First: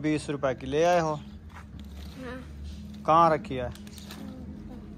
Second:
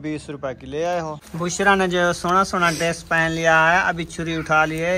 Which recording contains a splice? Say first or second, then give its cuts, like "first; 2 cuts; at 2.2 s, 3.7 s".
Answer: second; 1 cut; at 1.2 s